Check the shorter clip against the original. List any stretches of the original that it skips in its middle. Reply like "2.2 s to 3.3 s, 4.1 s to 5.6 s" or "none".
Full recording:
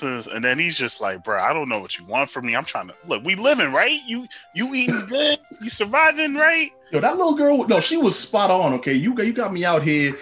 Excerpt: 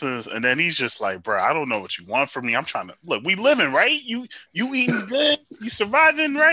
none